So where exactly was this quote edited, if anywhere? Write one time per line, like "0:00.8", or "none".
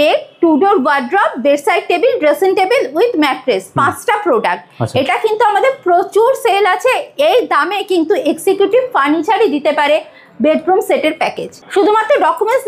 none